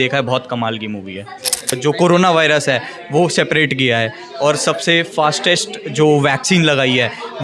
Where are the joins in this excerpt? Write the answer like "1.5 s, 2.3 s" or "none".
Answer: 1.7 s